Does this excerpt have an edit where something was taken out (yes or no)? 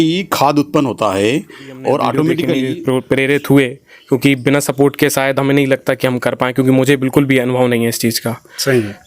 yes